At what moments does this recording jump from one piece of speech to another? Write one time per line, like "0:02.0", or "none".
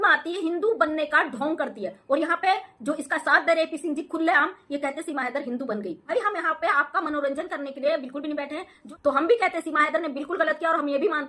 0:06.0
0:08.8